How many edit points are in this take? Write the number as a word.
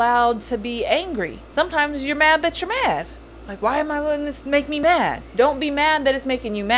two